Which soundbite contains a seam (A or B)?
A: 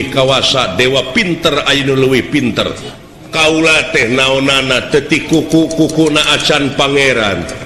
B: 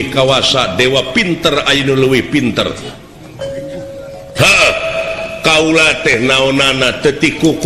A